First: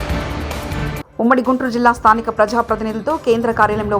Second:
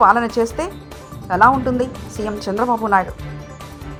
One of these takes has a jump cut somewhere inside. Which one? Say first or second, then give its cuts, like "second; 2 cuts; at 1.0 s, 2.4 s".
first; 1 cut; at 1.0 s